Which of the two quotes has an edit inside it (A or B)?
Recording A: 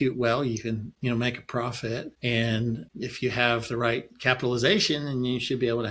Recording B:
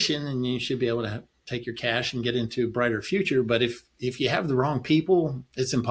A